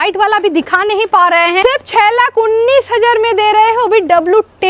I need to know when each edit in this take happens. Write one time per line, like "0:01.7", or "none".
0:01.6